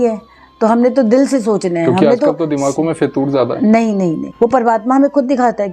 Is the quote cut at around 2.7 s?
no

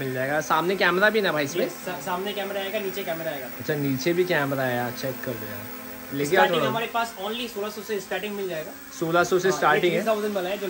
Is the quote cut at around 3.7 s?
no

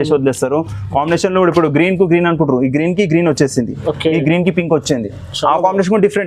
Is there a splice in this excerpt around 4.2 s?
no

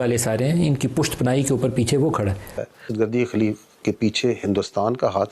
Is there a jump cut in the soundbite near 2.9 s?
yes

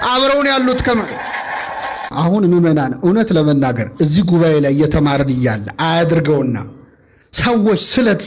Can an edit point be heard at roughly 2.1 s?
yes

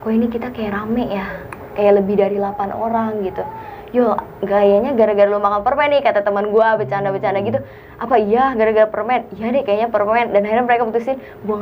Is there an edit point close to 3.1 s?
no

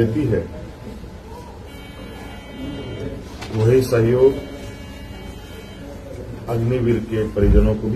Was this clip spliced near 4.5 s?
no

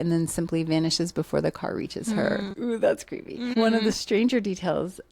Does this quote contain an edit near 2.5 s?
yes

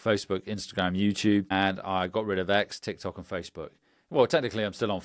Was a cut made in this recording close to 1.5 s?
yes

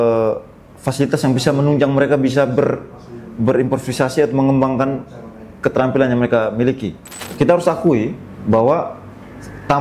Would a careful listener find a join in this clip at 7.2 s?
yes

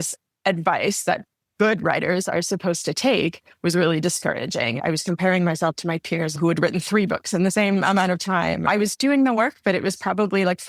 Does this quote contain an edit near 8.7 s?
yes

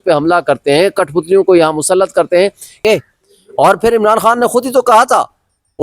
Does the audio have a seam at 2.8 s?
yes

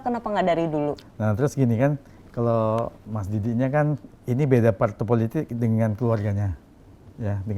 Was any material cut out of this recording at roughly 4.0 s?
no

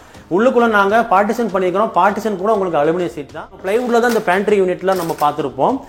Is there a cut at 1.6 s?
no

